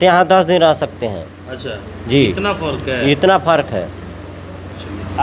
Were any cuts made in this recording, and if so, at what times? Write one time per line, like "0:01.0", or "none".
none